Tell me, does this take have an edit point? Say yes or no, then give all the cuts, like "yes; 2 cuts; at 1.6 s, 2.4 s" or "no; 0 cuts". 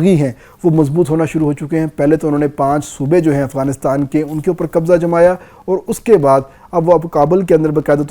no; 0 cuts